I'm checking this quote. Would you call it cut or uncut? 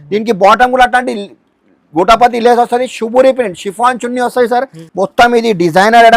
cut